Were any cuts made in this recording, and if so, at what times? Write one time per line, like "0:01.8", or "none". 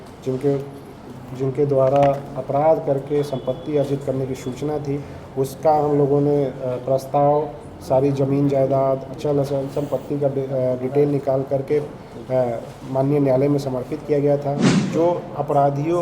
0:14.7